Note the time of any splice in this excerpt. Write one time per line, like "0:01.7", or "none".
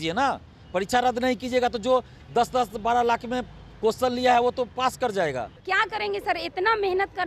0:05.6